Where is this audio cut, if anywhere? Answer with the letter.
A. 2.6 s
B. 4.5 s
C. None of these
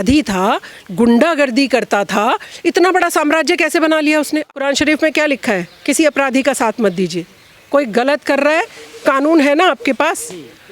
B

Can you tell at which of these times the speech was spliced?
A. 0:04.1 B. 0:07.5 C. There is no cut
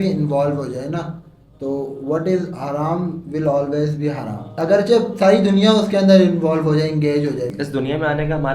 B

